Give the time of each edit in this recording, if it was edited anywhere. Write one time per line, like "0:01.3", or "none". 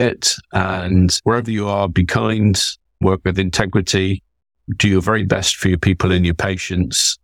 0:01.2